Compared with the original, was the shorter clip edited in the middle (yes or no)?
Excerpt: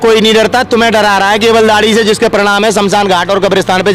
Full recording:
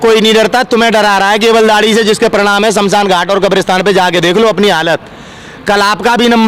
no